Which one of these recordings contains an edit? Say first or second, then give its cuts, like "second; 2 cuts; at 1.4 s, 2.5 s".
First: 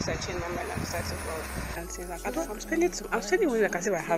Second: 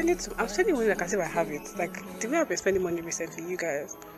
first; 1 cut; at 1.8 s